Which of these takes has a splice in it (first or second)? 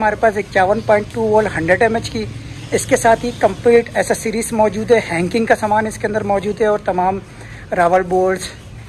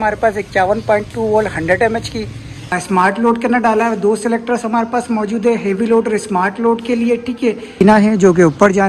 second